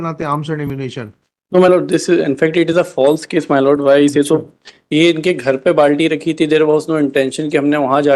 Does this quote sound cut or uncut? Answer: uncut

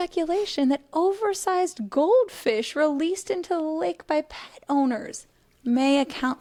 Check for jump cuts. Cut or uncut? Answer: uncut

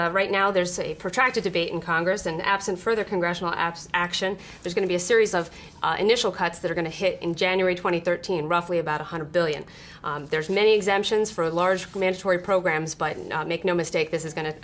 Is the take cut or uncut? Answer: uncut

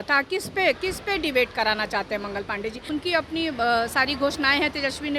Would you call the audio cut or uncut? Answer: cut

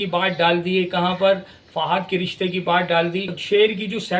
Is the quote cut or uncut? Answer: uncut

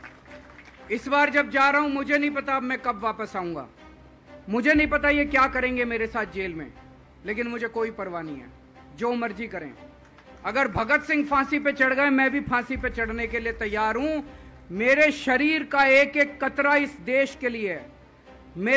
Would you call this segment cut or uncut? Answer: uncut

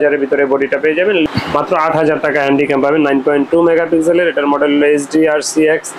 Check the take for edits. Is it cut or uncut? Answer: cut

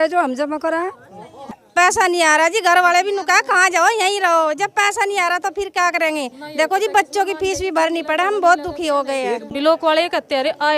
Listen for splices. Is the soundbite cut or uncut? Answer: cut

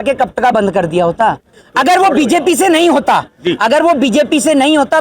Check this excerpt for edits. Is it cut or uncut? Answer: cut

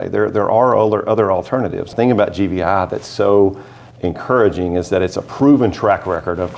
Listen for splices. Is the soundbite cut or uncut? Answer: cut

